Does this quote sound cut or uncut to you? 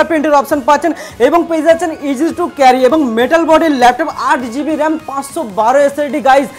uncut